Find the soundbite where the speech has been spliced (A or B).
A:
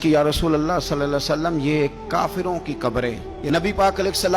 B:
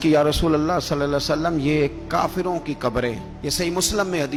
A